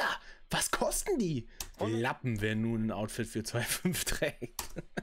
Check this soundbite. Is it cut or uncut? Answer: cut